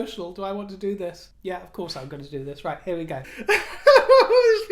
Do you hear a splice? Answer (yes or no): yes